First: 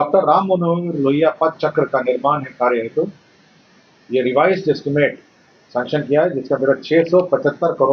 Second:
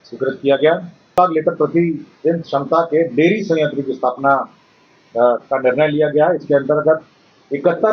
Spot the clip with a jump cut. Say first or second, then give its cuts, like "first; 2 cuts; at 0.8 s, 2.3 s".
second; 1 cut; at 1.2 s